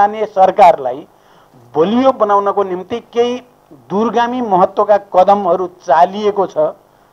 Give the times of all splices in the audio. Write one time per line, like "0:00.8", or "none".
none